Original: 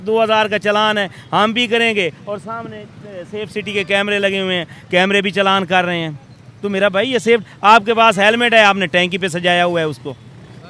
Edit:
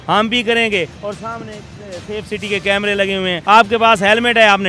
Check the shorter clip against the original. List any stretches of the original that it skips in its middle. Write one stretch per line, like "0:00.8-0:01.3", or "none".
0:04.6-0:07.5